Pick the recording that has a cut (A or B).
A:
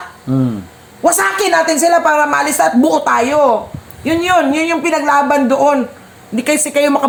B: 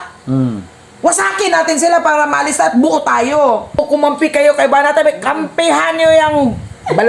B